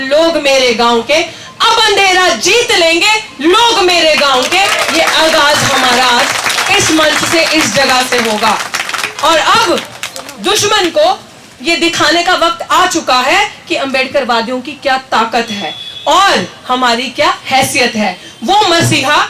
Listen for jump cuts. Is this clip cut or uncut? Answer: uncut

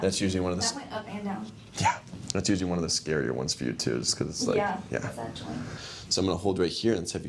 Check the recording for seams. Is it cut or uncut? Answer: uncut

